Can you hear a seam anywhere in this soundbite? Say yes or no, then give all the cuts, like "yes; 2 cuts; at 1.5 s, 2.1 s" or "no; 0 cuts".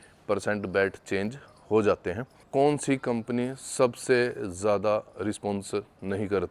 yes; 1 cut; at 2.3 s